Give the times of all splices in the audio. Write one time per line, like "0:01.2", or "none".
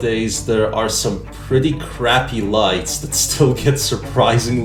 none